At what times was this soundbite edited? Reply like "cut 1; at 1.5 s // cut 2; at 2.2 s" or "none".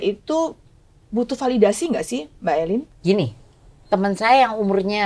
cut 1; at 2.9 s